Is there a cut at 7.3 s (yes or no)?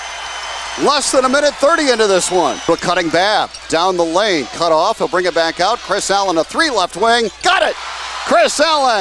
no